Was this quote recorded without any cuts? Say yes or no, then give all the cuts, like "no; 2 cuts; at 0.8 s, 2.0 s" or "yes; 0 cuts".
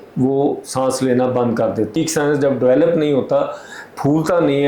no; 1 cut; at 1.9 s